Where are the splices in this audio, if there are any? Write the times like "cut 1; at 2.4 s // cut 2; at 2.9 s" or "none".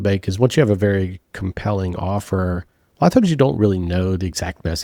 none